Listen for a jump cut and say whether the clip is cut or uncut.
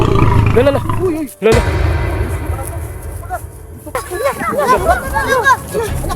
cut